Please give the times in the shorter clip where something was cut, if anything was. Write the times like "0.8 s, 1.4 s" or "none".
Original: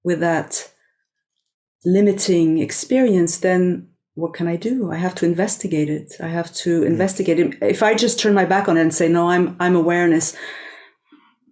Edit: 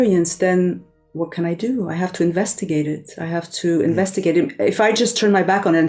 none